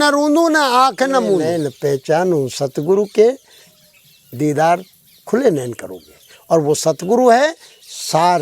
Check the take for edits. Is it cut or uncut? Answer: cut